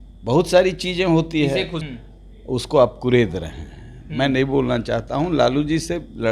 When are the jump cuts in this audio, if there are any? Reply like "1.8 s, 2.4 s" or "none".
1.8 s